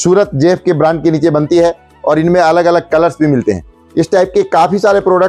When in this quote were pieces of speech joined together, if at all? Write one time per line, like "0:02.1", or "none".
0:03.7